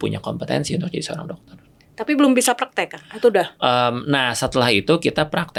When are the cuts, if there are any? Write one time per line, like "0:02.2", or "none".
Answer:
none